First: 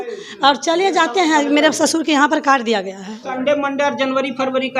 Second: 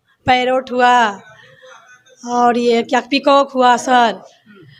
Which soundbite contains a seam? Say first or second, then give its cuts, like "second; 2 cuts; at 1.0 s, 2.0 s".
first; 1 cut; at 3.3 s